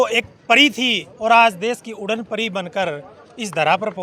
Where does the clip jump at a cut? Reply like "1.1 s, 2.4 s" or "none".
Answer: none